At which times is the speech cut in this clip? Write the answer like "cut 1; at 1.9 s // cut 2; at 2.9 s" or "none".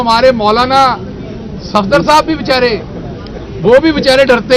none